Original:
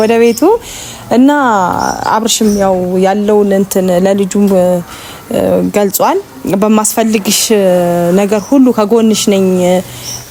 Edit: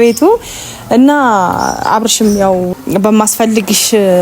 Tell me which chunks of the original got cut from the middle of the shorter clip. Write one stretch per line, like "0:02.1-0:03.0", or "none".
0:02.9-0:06.3

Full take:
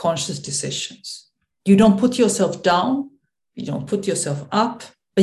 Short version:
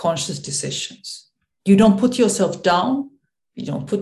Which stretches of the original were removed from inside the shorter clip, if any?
none

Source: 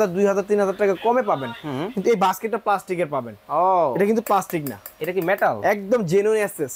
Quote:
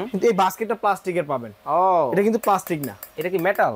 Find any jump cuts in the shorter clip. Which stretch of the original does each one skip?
none

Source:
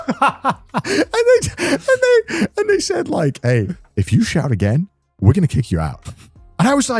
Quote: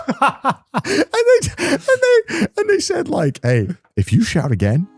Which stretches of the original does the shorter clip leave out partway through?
none

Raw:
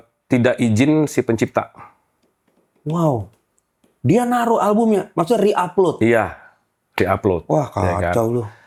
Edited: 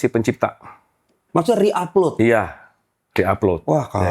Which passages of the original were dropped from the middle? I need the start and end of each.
0:02.4-0:05.1

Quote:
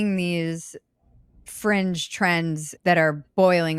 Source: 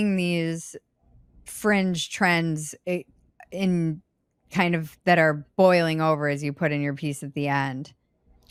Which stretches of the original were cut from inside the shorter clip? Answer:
0:02.7-0:04.9

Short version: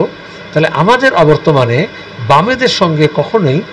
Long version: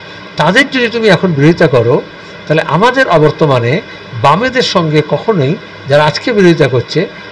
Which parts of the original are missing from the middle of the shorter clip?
none

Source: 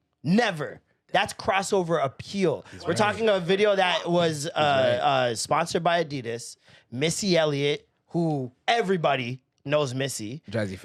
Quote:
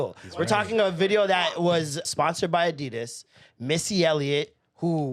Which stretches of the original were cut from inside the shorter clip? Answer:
0:04.5-0:05.4

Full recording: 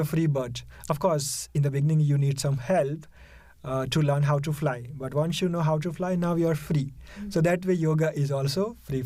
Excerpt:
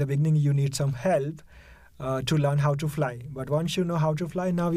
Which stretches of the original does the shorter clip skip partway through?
none

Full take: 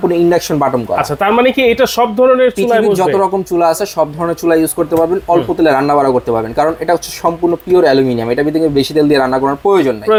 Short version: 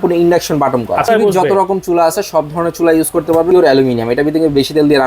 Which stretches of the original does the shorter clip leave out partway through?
0:01.1-0:02.7
0:05.1-0:07.7

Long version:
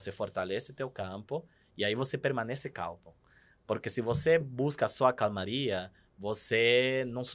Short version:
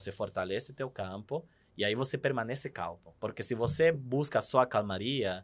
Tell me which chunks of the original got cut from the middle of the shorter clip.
0:03.1-0:03.5

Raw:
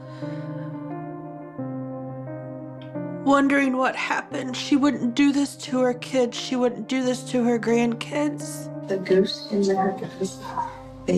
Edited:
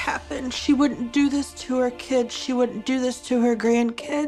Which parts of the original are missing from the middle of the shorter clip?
none

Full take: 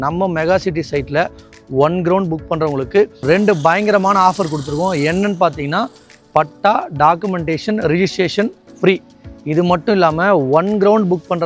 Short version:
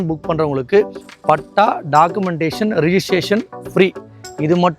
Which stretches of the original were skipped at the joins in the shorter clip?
0:03.2-0:06.0

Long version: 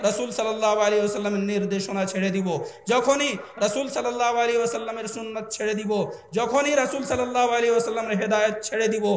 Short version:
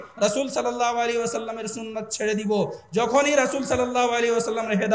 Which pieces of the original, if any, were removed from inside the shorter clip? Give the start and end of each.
none

